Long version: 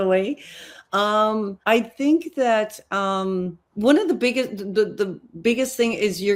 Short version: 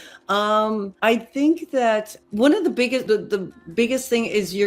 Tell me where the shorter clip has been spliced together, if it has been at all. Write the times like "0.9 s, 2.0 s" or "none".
2.2 s, 3.0 s